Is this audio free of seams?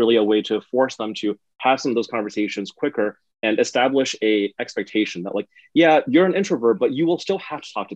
yes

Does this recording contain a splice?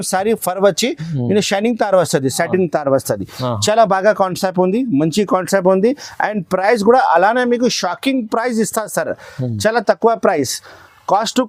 no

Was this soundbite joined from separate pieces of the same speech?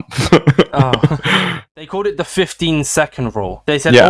yes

